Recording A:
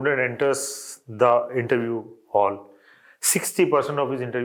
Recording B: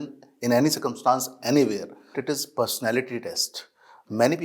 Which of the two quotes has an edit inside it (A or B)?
B